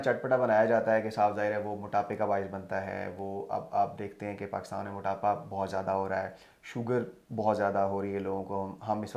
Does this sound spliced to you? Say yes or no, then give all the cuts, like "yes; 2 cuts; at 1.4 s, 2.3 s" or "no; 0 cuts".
no; 0 cuts